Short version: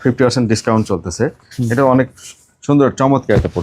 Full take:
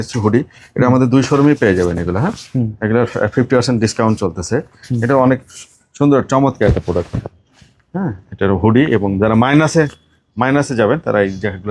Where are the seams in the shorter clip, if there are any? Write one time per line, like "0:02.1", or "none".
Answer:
none